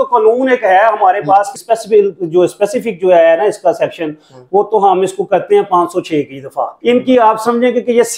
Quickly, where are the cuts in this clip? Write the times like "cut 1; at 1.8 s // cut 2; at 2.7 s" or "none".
cut 1; at 1.5 s // cut 2; at 6.7 s